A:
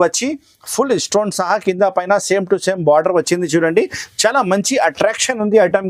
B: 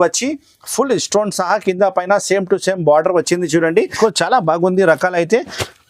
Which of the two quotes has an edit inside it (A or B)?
B